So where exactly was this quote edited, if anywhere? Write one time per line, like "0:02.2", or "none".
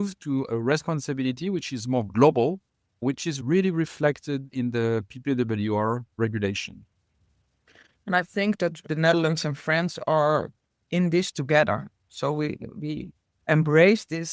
0:03.4
0:08.8